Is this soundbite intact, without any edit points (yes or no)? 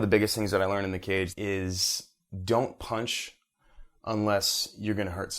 no